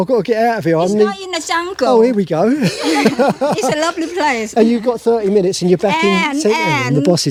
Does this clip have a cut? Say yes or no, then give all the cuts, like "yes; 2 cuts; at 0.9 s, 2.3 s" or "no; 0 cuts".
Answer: no; 0 cuts